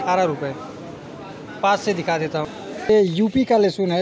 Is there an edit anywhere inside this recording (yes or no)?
yes